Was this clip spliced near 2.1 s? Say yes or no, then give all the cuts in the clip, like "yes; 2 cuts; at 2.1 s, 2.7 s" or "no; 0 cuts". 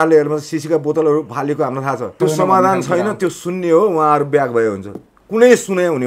yes; 1 cut; at 2.1 s